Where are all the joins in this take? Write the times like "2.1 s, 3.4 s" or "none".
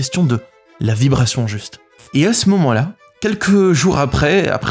1.9 s